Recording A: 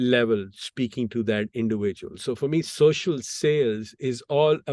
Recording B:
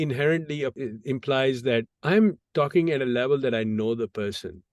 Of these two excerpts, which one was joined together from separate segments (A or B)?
B